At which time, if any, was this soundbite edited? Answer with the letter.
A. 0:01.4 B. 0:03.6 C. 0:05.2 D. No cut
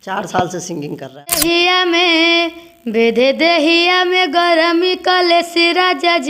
A